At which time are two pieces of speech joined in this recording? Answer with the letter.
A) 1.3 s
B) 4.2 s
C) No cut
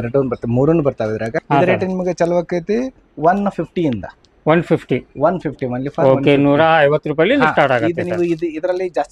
A